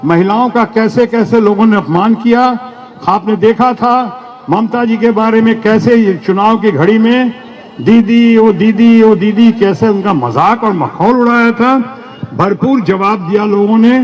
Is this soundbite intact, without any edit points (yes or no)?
yes